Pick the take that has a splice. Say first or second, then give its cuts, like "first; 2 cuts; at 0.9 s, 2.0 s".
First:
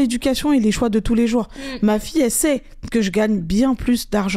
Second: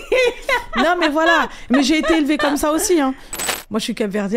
second; 1 cut; at 3.3 s